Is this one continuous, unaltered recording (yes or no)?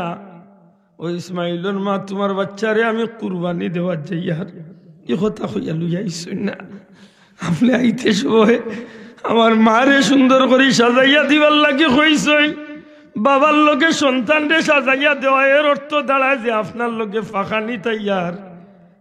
yes